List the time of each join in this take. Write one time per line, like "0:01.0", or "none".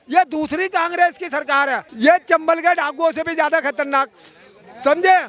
0:01.8

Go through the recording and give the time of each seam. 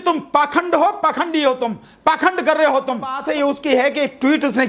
0:03.2

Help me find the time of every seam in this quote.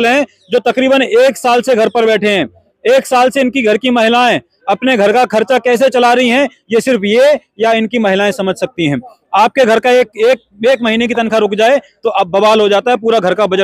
none

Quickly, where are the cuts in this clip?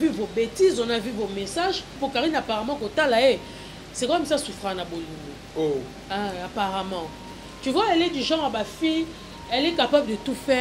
0:02.0

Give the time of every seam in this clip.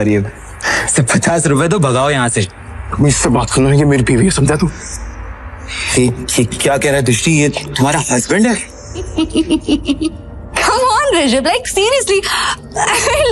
0:09.1

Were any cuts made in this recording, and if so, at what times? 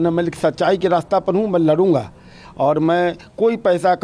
none

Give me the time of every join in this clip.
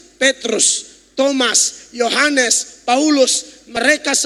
none

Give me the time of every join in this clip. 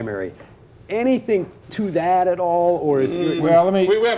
0:01.6

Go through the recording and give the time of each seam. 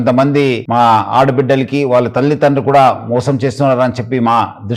none

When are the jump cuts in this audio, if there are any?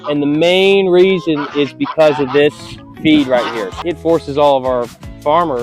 0:03.7

